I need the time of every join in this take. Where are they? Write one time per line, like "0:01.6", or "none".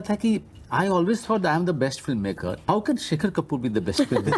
0:02.6